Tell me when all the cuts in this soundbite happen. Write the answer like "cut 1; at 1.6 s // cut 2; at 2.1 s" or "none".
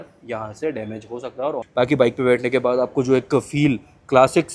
cut 1; at 1.6 s

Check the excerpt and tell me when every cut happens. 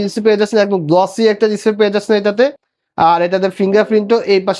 none

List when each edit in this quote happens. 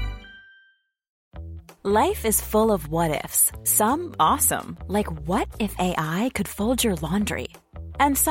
cut 1; at 1.2 s

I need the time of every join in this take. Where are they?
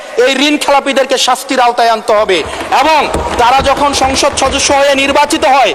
none

